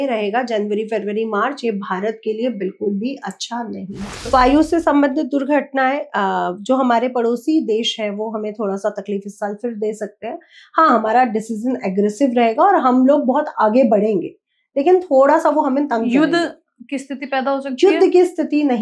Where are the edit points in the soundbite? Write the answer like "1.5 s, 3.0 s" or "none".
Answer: 4.3 s